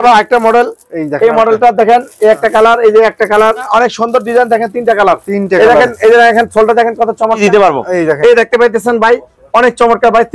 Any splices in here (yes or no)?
yes